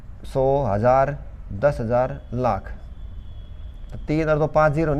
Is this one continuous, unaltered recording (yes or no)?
yes